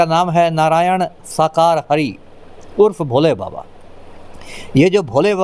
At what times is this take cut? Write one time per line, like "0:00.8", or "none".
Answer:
none